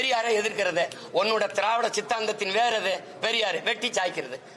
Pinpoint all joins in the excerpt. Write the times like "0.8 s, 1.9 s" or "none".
none